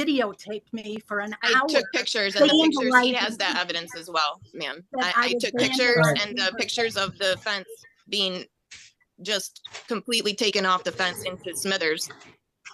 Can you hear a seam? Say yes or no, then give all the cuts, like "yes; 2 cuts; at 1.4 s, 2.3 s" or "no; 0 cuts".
no; 0 cuts